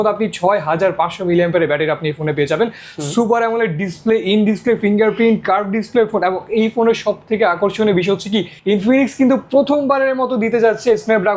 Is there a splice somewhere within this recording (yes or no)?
yes